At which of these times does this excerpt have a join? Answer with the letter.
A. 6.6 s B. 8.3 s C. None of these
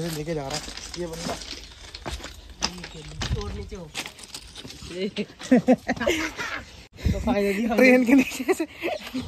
C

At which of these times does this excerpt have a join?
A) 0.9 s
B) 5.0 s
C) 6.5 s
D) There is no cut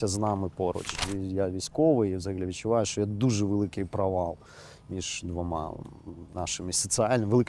A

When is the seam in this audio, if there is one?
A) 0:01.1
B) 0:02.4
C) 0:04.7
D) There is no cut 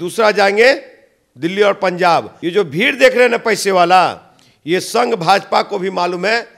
B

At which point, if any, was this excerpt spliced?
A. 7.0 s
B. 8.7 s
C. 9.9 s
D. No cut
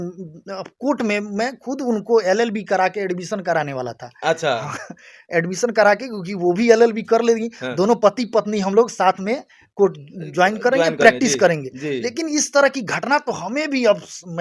D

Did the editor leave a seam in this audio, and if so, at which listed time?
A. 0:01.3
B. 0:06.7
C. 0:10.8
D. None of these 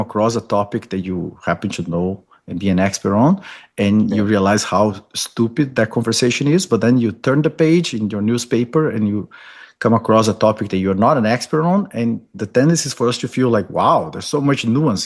D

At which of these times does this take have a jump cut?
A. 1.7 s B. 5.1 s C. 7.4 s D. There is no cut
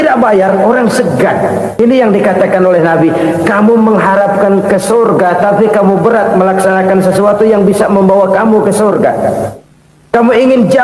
A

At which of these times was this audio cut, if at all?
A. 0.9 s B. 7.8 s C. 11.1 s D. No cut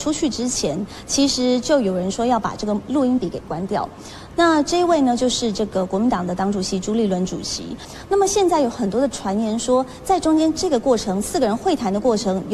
B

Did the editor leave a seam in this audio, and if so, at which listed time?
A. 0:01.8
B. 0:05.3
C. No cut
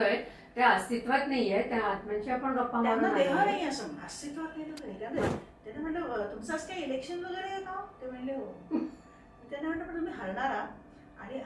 B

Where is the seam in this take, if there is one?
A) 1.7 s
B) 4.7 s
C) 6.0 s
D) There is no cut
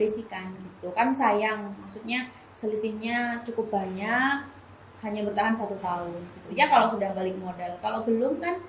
D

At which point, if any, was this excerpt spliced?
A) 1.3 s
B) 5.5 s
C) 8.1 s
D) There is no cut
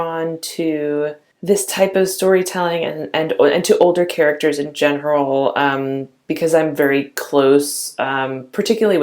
A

